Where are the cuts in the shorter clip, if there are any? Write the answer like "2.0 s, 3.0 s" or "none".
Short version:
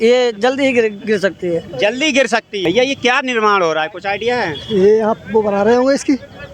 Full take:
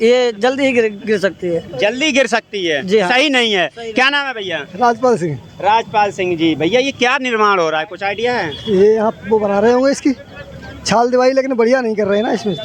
2.6 s

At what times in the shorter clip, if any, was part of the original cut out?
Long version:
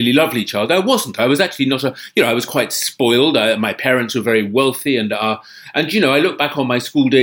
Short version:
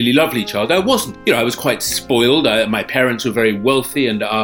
1.1 s

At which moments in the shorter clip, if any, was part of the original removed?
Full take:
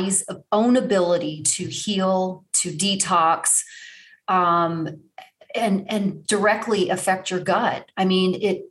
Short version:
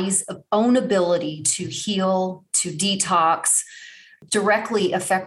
4.2 s

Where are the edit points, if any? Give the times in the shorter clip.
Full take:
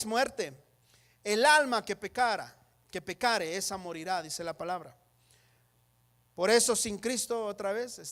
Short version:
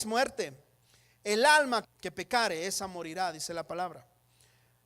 1.9 s

